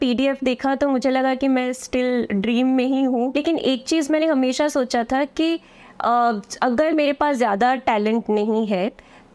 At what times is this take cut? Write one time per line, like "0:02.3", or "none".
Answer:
0:03.3